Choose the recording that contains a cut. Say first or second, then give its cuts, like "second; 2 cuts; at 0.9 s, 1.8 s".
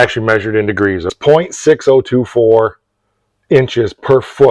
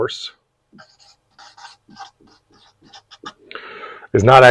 first; 1 cut; at 1.1 s